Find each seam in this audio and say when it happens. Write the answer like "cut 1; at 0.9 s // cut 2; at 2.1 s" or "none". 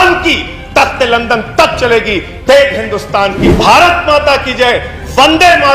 cut 1; at 3.5 s

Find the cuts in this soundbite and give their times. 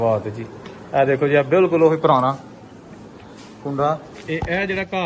cut 1; at 4.1 s

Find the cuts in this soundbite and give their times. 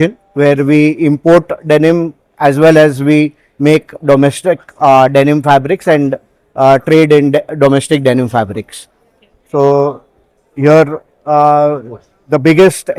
none

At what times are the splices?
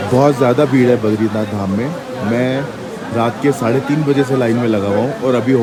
none

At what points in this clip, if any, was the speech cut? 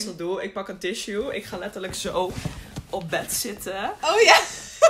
none

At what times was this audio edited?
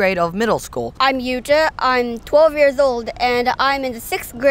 cut 1; at 1.0 s

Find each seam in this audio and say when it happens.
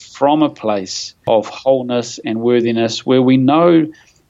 cut 1; at 1.2 s

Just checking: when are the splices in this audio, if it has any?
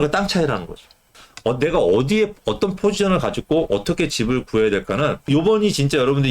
none

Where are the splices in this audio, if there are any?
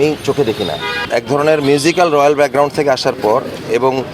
cut 1; at 0.9 s

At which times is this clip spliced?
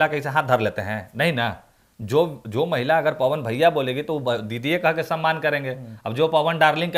none

